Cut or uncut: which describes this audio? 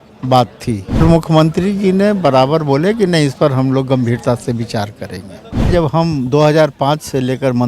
cut